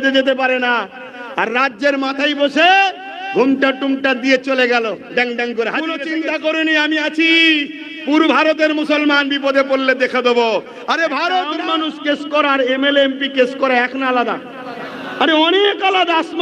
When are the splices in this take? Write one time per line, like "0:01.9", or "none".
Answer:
0:06.0
0:11.6